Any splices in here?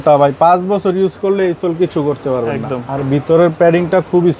no; 0 cuts

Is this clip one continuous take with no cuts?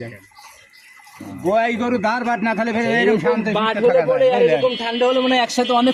yes; 0 cuts

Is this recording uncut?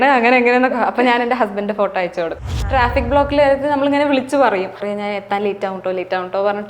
no; 2 cuts; at 2.4 s, 4.8 s

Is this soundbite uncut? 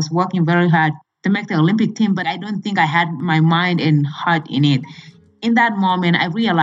no; 4 cuts; at 1.0 s, 2.2 s, 3.2 s, 5.1 s

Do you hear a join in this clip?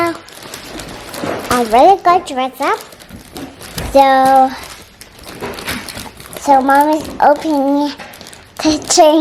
no; 0 cuts

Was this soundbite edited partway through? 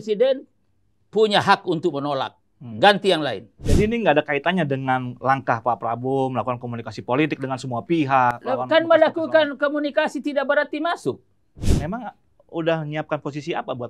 yes; 2 cuts; at 3.7 s, 11.6 s

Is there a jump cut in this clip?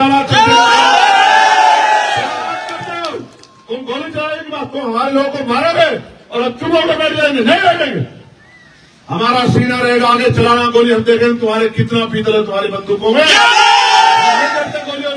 no; 0 cuts

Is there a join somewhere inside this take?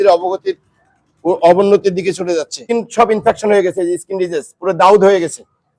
yes; 1 cut; at 2.6 s

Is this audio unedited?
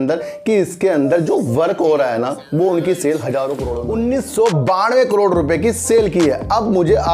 no; 1 cut; at 3.8 s

